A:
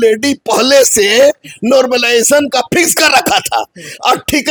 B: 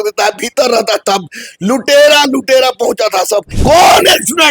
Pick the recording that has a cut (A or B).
B